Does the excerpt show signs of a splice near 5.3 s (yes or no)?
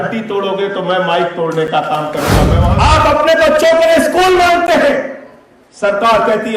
no